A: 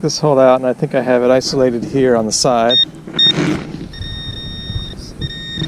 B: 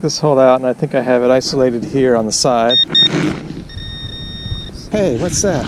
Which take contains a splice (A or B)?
B